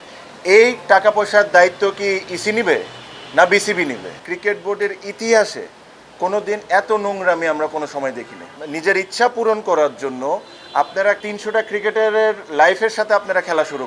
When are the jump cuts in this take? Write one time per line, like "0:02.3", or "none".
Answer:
0:04.2
0:08.7
0:11.2